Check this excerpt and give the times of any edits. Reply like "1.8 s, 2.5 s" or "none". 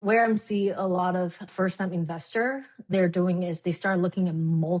1.5 s, 2.9 s

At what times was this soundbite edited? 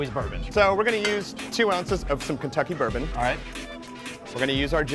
1.2 s

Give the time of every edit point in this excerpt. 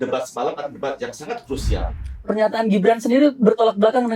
1.8 s

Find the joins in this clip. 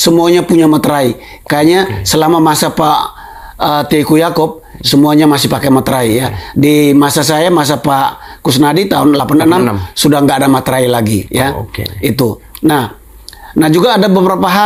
none

